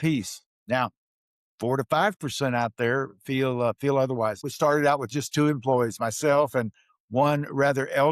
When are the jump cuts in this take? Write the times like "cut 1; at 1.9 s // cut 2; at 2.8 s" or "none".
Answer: cut 1; at 4.5 s